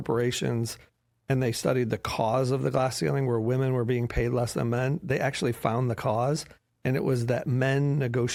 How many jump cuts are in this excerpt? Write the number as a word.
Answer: zero